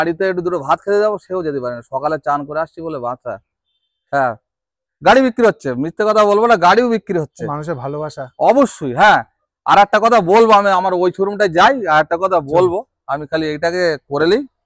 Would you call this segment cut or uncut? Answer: uncut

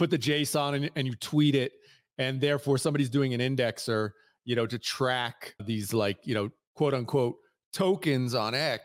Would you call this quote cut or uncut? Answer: cut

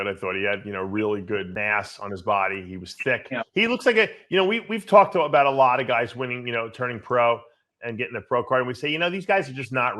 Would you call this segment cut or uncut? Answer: cut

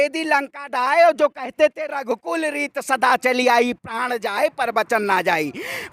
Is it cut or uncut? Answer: uncut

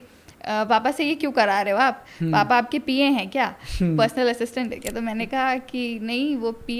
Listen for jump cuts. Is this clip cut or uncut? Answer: uncut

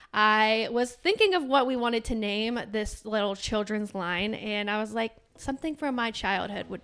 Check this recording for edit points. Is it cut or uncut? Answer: uncut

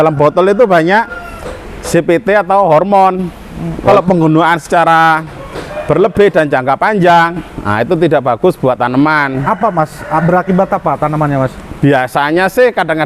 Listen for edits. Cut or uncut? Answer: cut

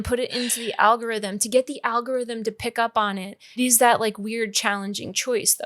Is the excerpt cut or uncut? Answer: cut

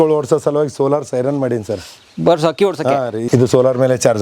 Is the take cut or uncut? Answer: cut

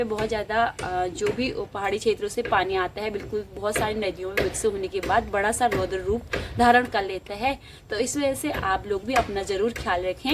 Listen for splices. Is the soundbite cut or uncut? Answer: uncut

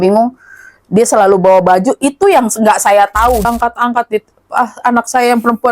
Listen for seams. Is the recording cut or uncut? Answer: cut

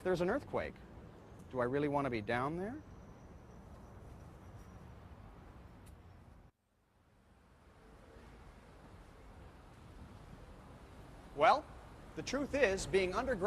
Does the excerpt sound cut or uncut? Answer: cut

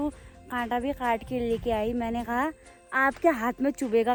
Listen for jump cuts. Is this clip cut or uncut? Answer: uncut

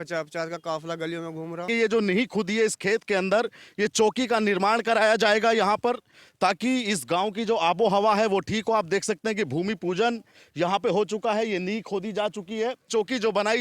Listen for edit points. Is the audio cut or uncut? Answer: cut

